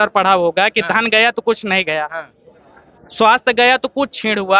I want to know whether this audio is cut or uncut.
uncut